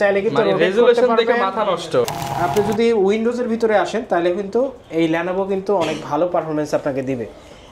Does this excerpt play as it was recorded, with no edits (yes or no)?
no